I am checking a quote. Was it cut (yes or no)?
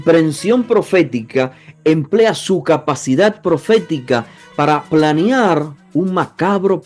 no